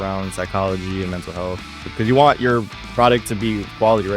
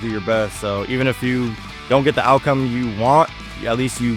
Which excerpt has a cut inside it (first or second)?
first